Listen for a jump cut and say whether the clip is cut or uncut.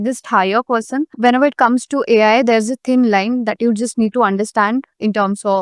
cut